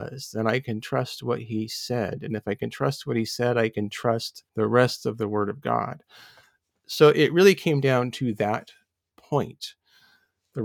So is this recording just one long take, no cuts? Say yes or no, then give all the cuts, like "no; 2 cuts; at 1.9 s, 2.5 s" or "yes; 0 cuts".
no; 1 cut; at 4.4 s